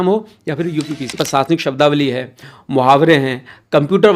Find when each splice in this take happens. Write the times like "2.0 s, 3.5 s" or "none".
1.2 s